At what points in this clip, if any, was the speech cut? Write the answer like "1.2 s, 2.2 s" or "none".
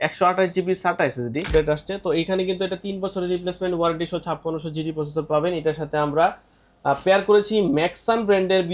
1.5 s